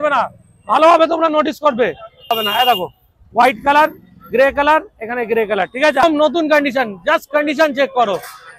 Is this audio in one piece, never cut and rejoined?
no; 2 cuts; at 2.3 s, 6.0 s

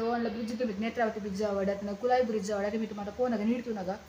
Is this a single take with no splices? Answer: yes; 0 cuts

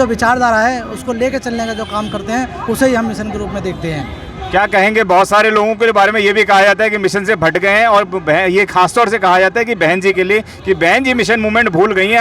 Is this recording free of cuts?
yes; 0 cuts

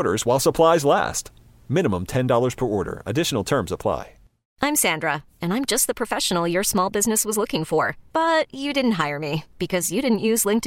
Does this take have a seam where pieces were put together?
yes; 1 cut; at 4.4 s

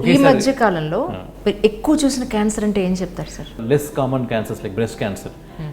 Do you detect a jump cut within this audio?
yes; 1 cut; at 3.5 s

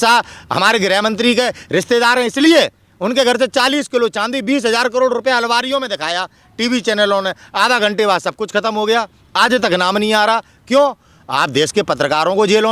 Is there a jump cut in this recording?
no; 0 cuts

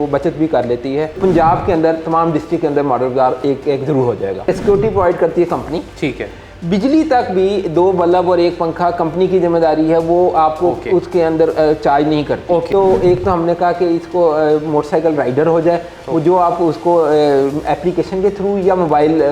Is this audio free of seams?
no; 3 cuts; at 1.2 s, 4.5 s, 12.7 s

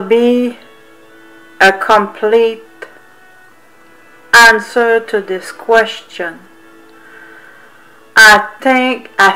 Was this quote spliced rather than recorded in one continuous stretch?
yes; 1 cut; at 4.7 s

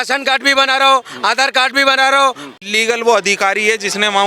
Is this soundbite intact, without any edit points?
no; 1 cut; at 2.5 s

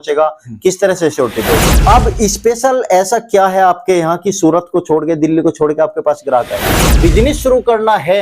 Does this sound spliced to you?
yes; 2 cuts; at 1.7 s, 7.0 s

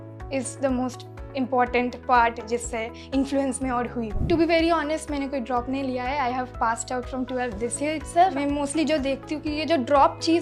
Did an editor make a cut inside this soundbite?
yes; 2 cuts; at 4.2 s, 8.3 s

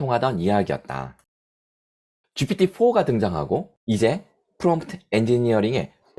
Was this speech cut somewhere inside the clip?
no; 0 cuts

